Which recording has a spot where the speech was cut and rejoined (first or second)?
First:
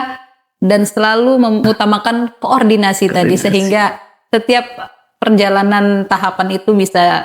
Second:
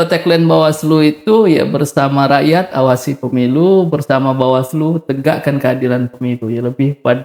first